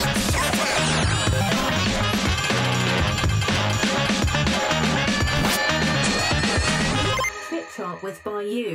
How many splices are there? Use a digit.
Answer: 0